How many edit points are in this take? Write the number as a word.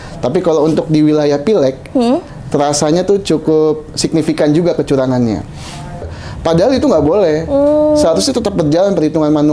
one